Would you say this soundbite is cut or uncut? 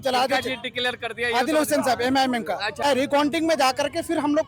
cut